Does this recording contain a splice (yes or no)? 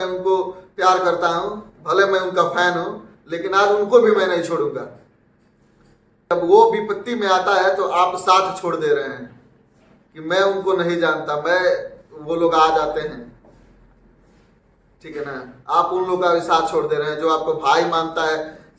yes